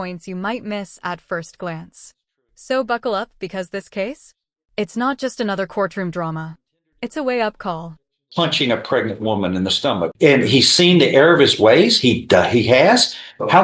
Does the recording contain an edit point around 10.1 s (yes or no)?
yes